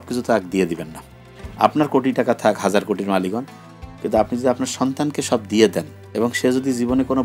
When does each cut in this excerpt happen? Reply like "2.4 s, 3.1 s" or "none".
none